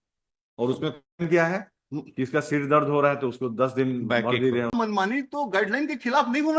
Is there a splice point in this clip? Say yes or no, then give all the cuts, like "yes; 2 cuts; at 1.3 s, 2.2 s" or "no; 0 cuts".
yes; 1 cut; at 4.7 s